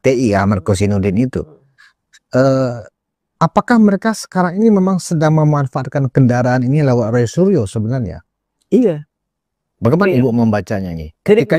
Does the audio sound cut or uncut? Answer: uncut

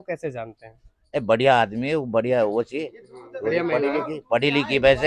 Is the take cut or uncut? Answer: uncut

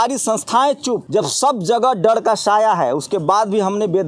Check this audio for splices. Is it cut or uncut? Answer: cut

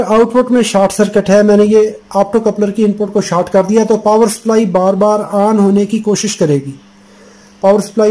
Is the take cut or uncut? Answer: uncut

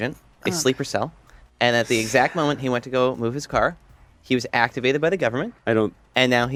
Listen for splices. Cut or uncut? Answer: uncut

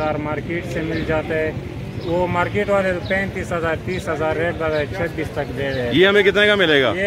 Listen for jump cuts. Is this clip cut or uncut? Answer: uncut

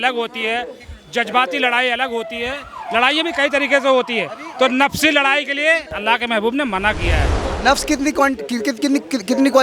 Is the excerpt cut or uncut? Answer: cut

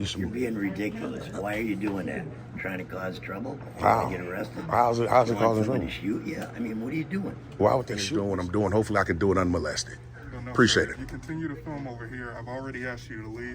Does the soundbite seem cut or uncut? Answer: cut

